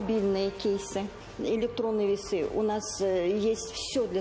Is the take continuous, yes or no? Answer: no